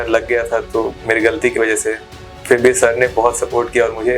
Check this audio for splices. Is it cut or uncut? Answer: uncut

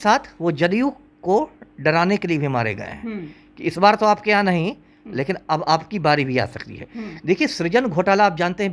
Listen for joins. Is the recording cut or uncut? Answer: uncut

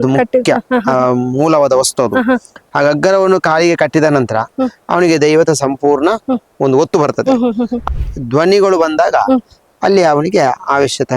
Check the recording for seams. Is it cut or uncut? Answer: cut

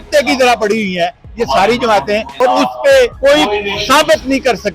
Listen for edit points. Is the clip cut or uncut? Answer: cut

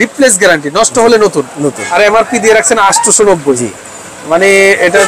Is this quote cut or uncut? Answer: cut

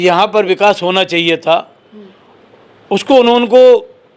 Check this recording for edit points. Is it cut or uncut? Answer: uncut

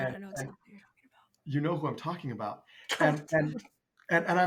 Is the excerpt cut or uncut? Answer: uncut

